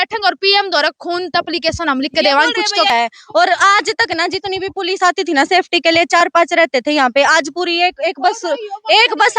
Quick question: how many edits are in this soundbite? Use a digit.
1